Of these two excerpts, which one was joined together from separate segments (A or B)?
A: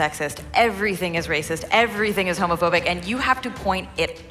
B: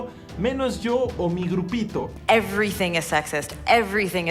B